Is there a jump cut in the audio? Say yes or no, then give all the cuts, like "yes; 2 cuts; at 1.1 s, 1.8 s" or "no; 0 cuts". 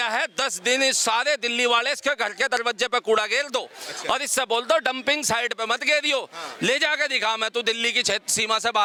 no; 0 cuts